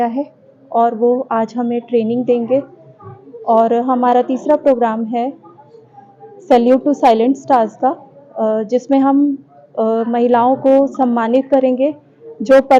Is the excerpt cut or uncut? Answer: uncut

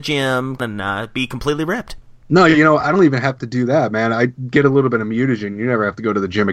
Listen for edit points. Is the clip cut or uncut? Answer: uncut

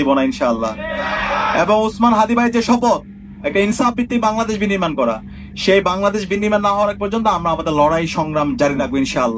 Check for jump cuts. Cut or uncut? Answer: cut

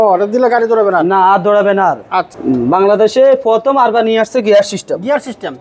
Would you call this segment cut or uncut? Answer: cut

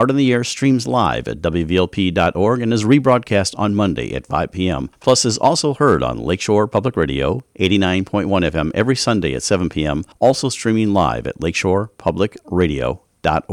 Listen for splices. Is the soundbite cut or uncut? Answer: cut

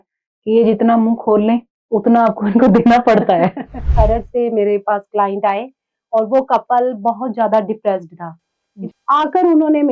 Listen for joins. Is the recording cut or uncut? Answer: cut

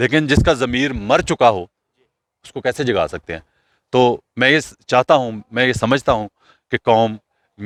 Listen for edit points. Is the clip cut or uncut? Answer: uncut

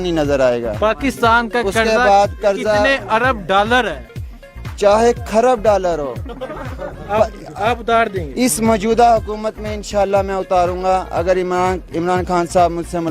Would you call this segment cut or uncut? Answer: uncut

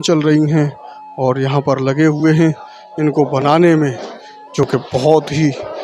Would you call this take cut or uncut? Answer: uncut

